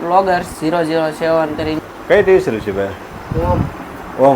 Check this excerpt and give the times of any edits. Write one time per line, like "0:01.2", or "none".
0:01.8